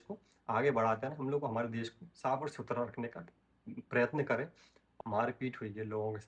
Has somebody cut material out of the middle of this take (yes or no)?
yes